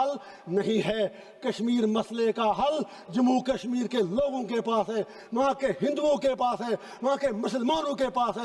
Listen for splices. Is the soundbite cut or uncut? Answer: uncut